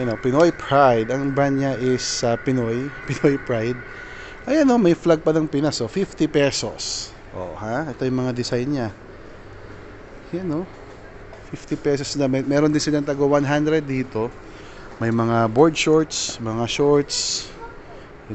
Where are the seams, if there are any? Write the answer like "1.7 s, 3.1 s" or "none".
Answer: none